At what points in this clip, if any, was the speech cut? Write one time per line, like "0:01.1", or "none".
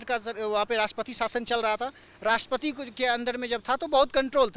none